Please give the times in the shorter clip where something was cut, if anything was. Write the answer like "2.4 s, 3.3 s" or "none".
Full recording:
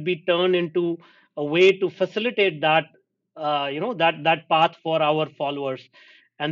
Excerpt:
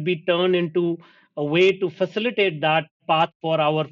3.0 s